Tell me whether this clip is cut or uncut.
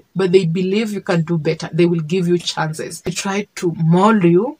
uncut